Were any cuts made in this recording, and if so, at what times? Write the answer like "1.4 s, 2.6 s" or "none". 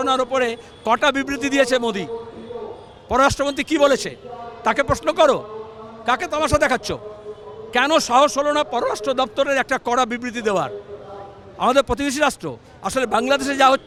none